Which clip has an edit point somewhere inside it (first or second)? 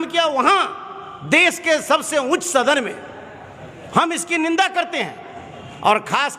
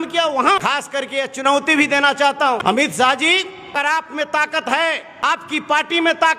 second